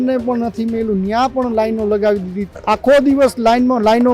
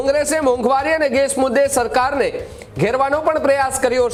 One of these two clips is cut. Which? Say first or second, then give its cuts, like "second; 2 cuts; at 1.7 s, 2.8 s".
first; 1 cut; at 2.4 s